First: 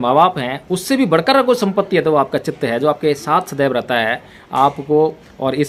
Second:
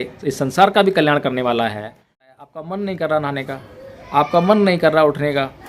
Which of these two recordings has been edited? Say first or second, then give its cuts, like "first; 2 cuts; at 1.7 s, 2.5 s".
second; 1 cut; at 2.3 s